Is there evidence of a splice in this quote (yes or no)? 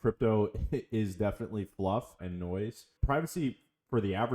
yes